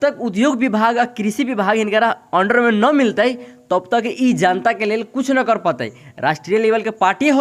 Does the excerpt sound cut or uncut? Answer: uncut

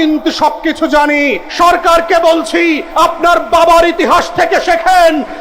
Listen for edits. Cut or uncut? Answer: cut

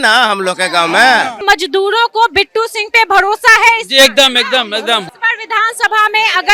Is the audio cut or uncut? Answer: cut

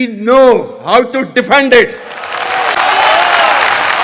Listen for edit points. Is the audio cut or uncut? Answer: uncut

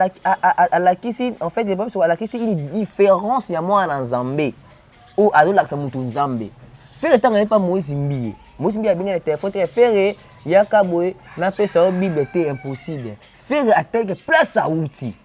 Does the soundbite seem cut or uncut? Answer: uncut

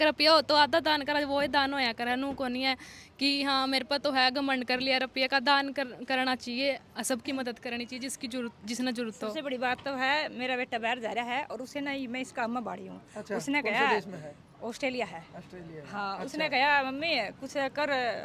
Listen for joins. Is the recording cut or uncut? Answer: uncut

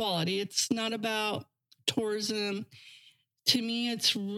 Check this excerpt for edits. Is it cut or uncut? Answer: uncut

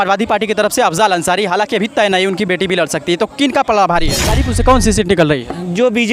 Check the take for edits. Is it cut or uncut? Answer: cut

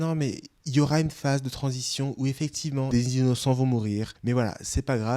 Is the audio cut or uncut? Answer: cut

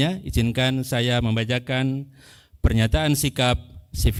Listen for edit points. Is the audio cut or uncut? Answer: uncut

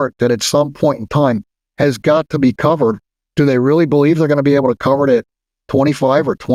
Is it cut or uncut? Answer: uncut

